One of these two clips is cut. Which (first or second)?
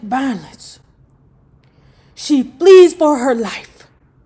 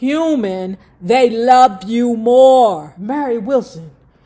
second